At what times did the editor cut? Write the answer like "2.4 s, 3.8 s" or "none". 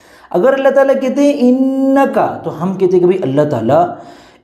2.7 s